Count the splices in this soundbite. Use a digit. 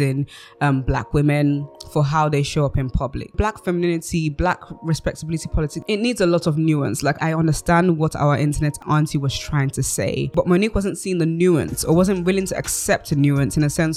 5